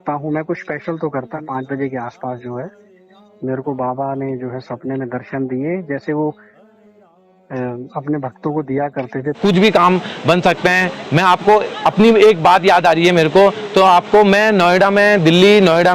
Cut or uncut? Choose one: cut